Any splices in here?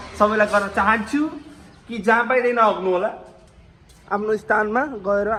no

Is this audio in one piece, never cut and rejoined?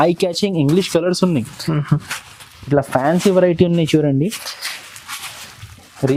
yes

